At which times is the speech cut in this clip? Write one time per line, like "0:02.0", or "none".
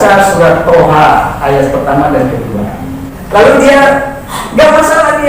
0:03.1